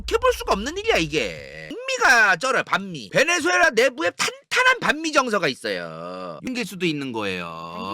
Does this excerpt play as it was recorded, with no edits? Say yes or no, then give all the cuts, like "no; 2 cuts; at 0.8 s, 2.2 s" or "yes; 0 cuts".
no; 2 cuts; at 1.8 s, 6.4 s